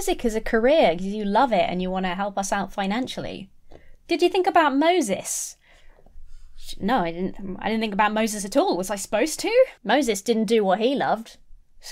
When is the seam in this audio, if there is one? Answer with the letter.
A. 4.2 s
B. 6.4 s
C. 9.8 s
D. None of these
C